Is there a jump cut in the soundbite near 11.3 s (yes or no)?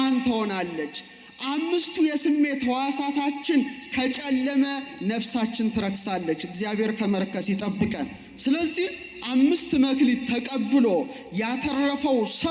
no